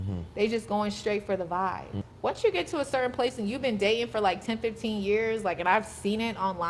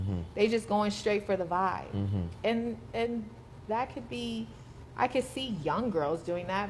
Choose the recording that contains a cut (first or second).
first